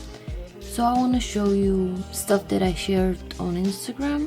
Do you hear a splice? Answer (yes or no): yes